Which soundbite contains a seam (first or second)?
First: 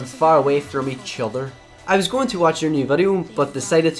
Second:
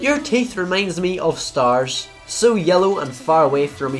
first